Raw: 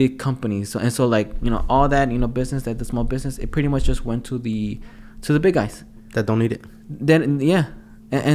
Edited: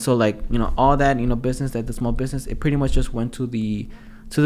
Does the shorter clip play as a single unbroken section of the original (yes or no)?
yes